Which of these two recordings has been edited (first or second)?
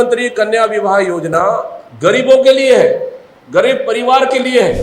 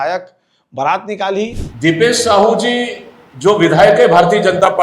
second